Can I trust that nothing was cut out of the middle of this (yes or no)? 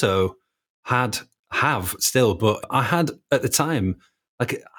yes